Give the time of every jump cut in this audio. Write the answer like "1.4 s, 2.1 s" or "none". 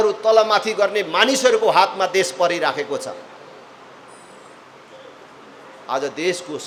none